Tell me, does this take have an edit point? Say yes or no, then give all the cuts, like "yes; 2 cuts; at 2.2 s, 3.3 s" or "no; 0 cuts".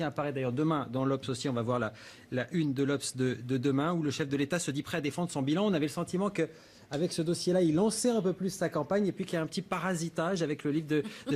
yes; 1 cut; at 2.4 s